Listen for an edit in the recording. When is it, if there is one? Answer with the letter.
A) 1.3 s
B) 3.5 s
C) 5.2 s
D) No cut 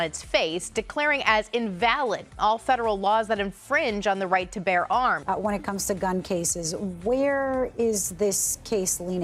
D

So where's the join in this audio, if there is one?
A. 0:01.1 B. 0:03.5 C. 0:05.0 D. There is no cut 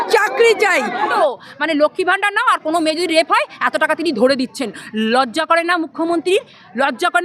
A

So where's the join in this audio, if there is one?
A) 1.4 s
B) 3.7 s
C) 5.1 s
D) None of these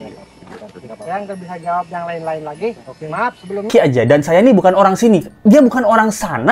B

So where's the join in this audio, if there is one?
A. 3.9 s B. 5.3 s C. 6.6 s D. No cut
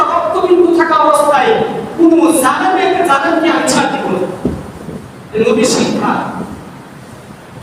D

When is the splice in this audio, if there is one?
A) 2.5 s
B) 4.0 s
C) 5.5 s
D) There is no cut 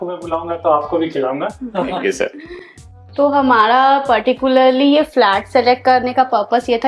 D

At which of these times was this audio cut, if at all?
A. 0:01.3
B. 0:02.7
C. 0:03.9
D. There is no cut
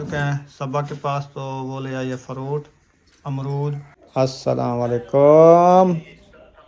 C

